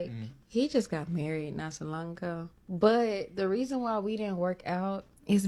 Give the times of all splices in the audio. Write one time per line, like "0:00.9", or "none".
none